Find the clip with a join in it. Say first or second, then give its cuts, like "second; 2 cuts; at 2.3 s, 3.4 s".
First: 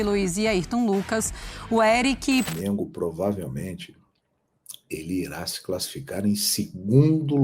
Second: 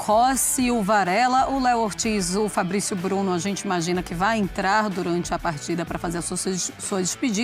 first; 1 cut; at 2.5 s